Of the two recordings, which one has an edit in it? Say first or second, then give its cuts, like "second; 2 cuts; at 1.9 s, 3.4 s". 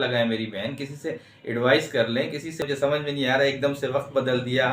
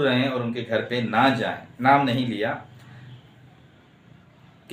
first; 1 cut; at 2.6 s